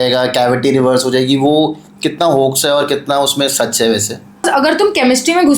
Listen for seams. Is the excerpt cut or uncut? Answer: cut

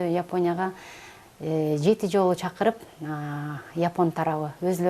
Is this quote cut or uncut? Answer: uncut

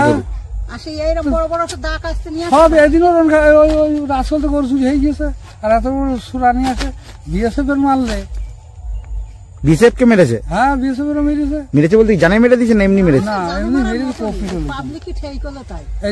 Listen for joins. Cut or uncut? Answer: uncut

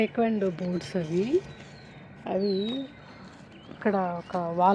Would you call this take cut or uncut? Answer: uncut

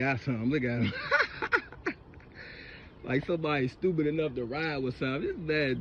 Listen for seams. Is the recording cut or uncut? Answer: uncut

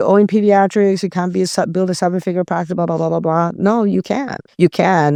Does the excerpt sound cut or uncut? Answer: uncut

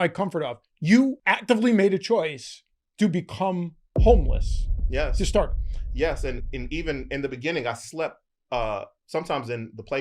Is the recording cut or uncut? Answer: cut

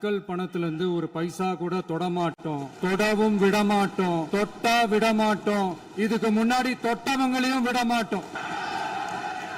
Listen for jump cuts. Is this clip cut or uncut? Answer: cut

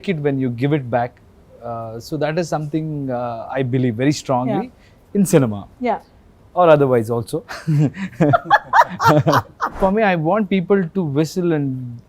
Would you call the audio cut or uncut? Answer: cut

